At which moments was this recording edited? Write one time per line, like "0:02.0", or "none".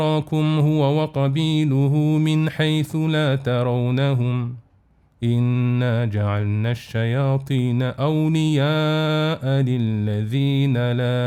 none